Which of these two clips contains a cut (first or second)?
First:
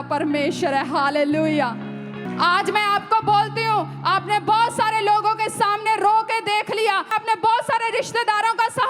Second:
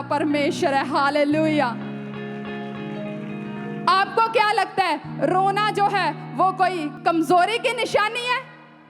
first